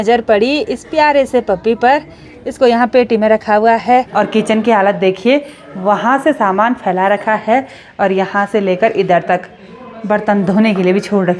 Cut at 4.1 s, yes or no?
yes